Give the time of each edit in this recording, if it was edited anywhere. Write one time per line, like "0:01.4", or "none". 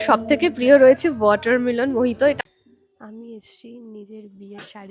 0:02.4